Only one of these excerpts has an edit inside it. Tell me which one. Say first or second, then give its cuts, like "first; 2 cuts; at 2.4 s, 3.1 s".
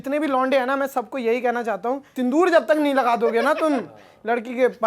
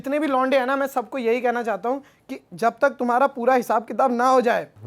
first; 1 cut; at 2.1 s